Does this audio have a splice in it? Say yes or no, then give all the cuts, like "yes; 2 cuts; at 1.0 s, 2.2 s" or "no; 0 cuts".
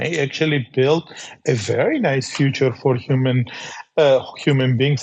no; 0 cuts